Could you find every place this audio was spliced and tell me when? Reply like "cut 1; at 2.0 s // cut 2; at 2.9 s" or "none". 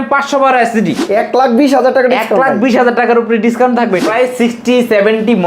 cut 1; at 1.0 s // cut 2; at 4.0 s